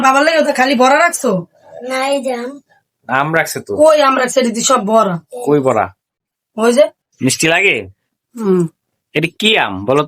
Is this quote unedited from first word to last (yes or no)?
no